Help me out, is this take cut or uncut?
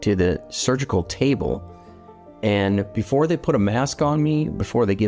uncut